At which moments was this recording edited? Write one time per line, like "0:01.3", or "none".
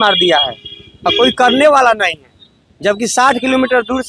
none